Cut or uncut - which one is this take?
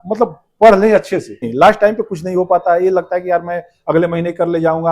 cut